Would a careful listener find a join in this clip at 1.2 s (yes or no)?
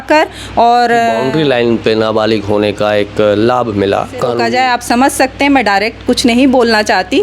yes